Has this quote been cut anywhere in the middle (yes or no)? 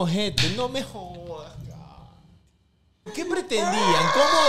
yes